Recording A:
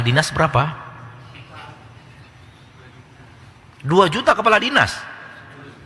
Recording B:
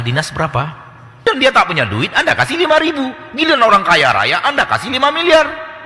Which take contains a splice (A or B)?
B